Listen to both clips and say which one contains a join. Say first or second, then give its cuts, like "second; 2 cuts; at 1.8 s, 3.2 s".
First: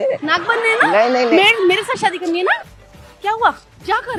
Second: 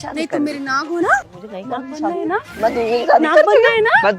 second; 1 cut; at 1.3 s